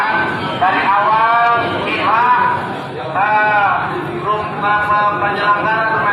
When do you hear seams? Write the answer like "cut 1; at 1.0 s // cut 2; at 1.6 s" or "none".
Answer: none